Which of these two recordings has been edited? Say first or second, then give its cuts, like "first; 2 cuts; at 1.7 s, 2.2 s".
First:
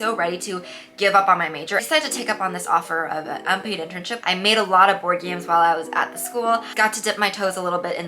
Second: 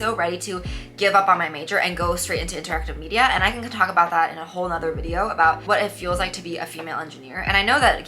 first; 3 cuts; at 1.8 s, 4.1 s, 6.7 s